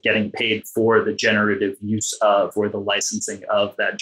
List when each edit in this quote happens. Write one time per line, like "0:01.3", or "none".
none